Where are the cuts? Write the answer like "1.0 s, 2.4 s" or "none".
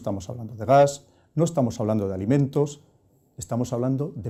none

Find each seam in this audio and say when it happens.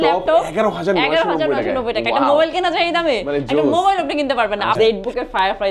4.8 s

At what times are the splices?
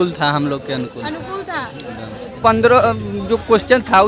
2.3 s

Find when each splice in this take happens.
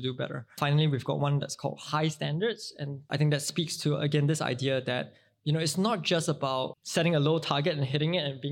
6.8 s

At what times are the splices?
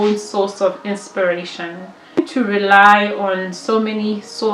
2.2 s

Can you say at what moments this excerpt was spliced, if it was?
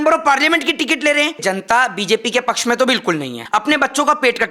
1.4 s, 3.4 s

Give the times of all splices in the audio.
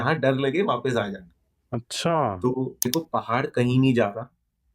2.9 s

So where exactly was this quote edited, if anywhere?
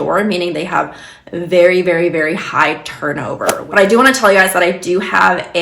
3.6 s

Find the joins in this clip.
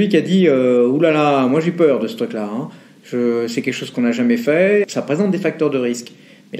4.8 s

